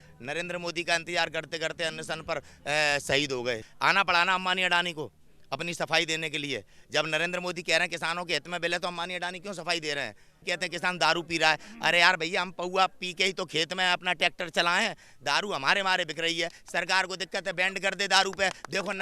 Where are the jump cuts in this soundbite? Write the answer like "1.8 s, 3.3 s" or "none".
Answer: 3.7 s, 10.3 s